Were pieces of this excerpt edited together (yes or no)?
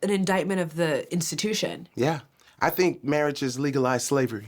yes